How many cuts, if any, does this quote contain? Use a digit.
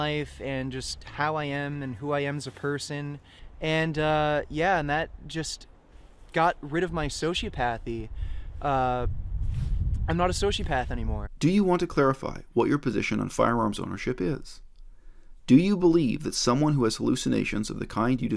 1